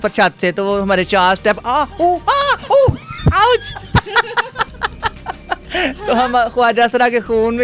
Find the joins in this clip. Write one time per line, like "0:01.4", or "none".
none

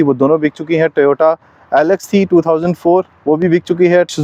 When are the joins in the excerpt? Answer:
none

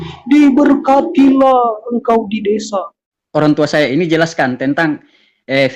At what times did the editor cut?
0:03.0

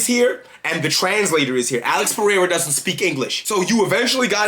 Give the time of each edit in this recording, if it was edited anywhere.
0:03.4

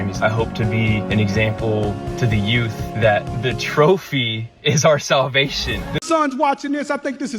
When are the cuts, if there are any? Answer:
0:06.0

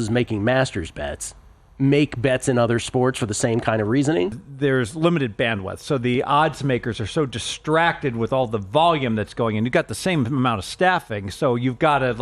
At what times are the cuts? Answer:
0:04.4

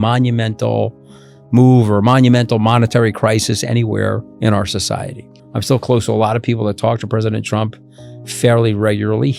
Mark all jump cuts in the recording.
0:04.3
0:05.4

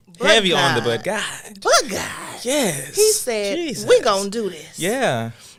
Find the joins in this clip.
none

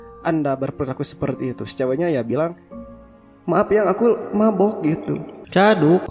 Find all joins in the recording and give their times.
none

